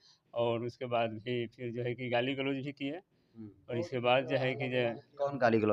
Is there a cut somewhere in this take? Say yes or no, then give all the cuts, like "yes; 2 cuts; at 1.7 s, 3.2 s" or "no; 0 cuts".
no; 0 cuts